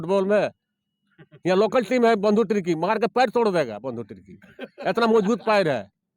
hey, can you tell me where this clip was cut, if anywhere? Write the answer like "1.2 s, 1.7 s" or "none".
none